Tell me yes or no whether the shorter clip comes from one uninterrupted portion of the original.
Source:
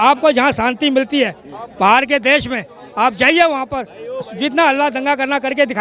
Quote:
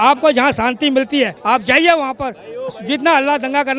no